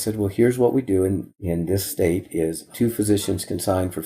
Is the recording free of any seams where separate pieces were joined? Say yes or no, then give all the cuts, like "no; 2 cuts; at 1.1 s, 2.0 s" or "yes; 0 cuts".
no; 2 cuts; at 1.8 s, 2.7 s